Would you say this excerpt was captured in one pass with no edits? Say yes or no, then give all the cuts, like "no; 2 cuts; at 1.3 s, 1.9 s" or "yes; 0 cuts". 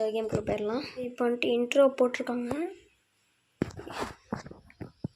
no; 1 cut; at 1.0 s